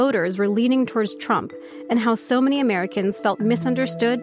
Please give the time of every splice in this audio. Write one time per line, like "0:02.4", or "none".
none